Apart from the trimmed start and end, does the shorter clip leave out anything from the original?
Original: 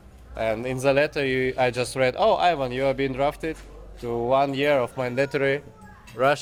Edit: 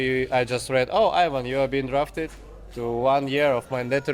no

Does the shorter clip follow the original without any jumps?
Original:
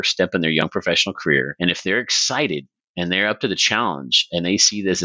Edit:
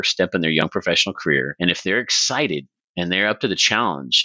yes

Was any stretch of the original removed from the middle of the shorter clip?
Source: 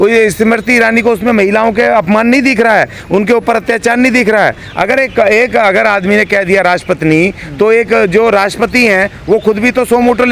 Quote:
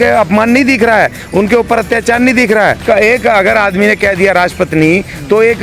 yes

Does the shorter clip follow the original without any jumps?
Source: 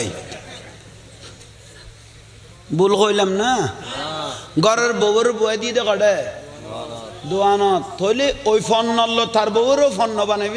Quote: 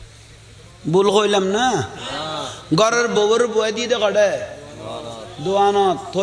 yes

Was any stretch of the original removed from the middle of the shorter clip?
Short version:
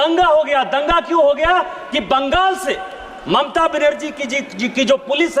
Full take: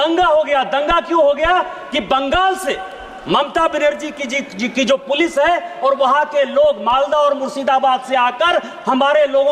no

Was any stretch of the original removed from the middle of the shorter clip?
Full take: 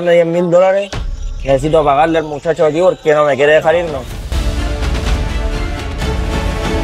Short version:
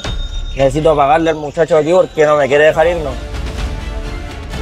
yes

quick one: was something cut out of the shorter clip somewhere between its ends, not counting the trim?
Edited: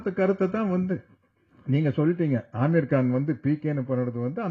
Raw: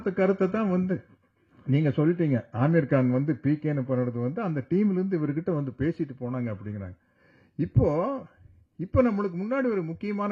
no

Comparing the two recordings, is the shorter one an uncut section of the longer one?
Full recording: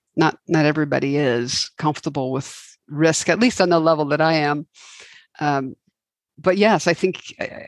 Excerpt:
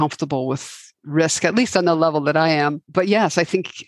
no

